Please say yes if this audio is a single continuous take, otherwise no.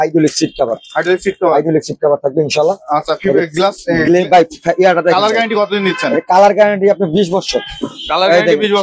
yes